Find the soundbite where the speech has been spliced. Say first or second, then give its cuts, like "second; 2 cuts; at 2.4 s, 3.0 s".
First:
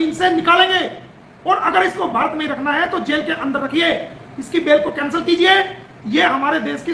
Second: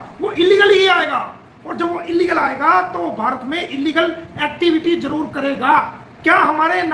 second; 1 cut; at 6.0 s